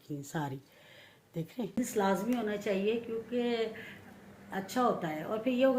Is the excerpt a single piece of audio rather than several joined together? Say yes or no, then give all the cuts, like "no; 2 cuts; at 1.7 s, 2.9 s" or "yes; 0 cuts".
no; 1 cut; at 1.8 s